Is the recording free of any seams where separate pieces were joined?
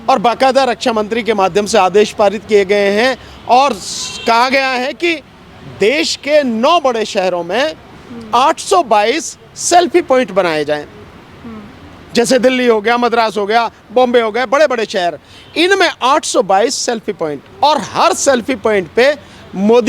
yes; 0 cuts

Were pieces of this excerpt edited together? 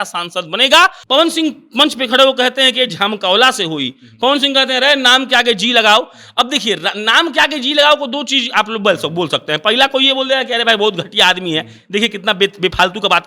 yes; 1 cut; at 1.0 s

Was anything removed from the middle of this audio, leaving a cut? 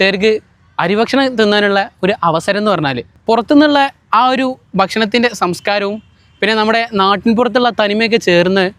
yes; 1 cut; at 3.2 s

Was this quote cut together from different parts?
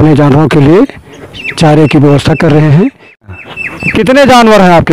yes; 1 cut; at 3.2 s

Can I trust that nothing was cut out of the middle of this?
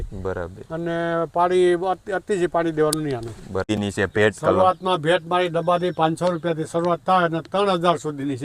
no; 1 cut; at 3.7 s

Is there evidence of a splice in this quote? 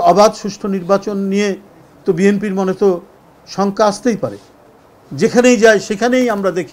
no; 0 cuts

